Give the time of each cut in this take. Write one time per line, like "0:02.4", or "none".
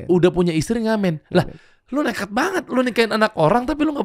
none